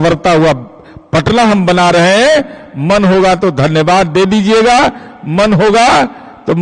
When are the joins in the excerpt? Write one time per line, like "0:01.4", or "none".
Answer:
none

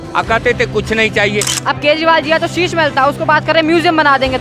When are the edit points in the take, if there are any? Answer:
0:01.5

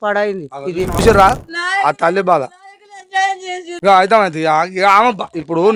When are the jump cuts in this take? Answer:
0:01.0

